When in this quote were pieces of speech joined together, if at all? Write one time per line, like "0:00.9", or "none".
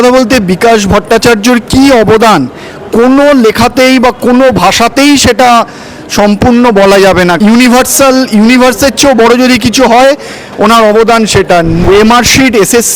0:07.4
0:11.8